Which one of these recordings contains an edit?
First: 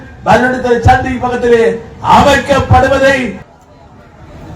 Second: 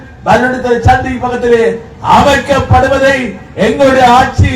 first; 1 cut; at 3.4 s

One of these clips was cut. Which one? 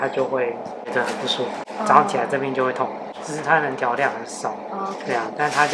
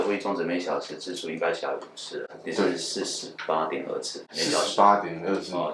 first; 1 cut; at 3.1 s

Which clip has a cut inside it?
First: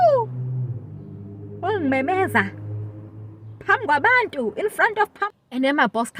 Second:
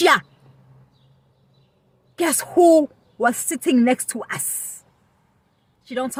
first; 1 cut; at 5.2 s

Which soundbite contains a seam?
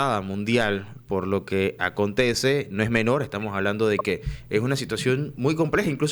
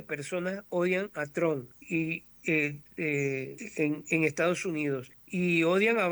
second; 3 cuts; at 1.7 s, 3.6 s, 5.2 s

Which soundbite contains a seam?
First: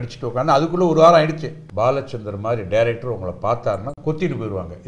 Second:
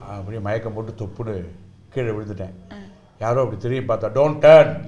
first; 1 cut; at 1.5 s

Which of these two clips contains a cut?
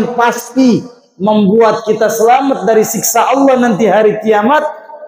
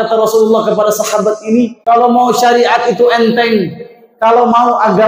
second; 1 cut; at 1.8 s

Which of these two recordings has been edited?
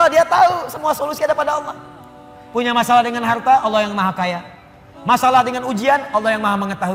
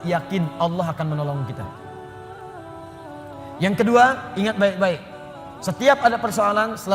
second; 2 cuts; at 1.9 s, 3.6 s

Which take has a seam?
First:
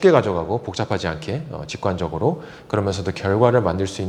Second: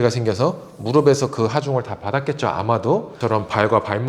second; 1 cut; at 3.1 s

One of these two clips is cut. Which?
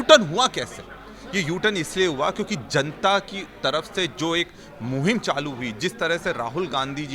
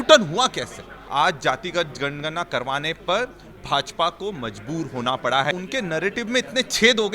second; 2 cuts; at 0.9 s, 5.5 s

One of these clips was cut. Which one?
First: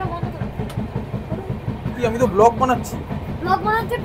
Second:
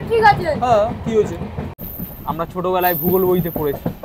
second; 1 cut; at 1.7 s

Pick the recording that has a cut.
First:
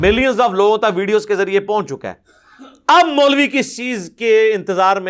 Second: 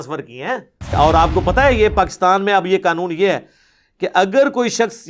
second; 1 cut; at 0.9 s

